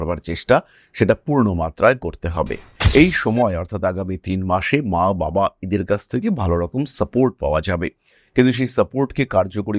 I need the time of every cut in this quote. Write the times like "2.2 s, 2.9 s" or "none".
2.7 s